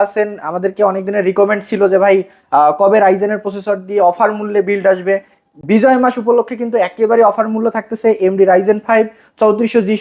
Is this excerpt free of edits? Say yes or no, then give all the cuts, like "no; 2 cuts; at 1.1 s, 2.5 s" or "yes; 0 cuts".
yes; 0 cuts